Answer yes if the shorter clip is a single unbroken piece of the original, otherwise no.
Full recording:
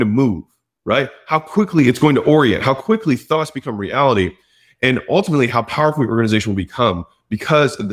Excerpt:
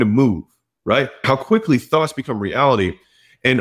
no